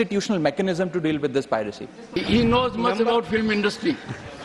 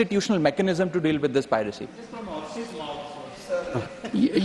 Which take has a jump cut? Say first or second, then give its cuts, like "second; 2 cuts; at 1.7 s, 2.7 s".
first; 1 cut; at 2.1 s